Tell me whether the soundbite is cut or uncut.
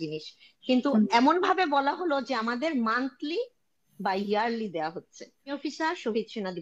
cut